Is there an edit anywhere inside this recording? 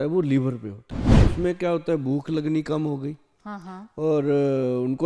yes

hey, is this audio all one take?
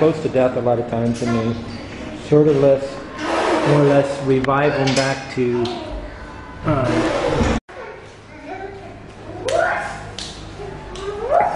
yes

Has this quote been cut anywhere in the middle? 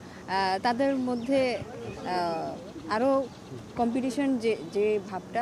no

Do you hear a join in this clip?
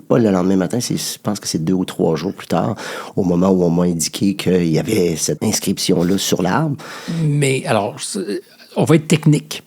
yes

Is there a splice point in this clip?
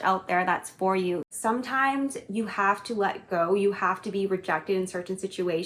yes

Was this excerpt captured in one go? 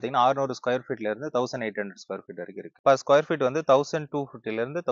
no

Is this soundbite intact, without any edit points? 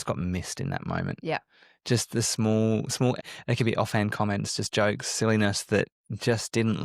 no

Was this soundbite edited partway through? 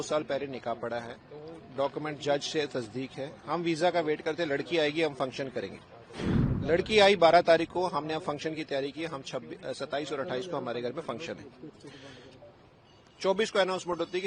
no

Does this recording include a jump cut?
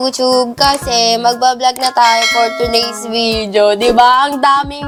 no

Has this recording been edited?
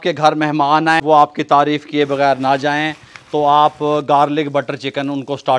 yes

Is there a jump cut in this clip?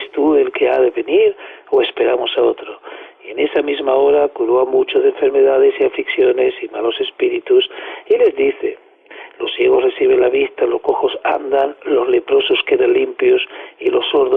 yes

